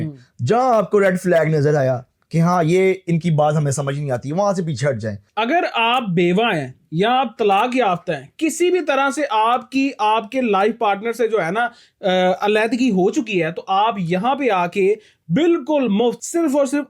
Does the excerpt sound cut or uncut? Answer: cut